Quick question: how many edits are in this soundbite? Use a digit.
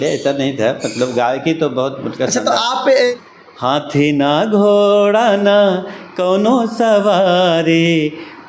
1